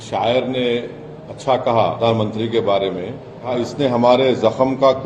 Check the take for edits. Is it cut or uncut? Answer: cut